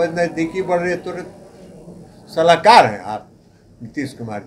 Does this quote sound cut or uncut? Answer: uncut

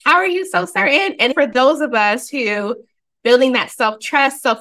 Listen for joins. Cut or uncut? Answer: cut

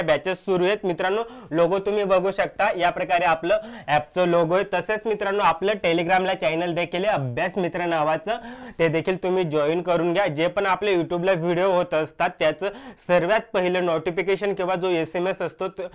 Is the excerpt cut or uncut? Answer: uncut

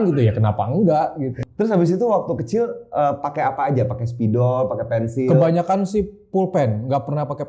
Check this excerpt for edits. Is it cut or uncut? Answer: cut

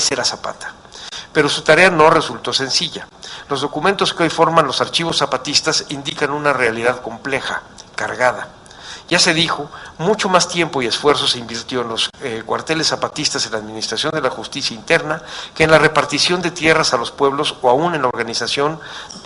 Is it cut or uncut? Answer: uncut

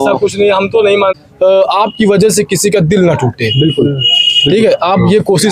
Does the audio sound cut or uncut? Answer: cut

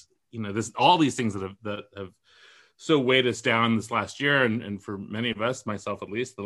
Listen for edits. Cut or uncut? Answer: uncut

